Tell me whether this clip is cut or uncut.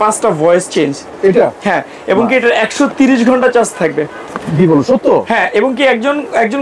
uncut